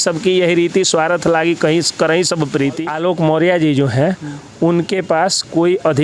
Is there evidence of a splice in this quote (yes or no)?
yes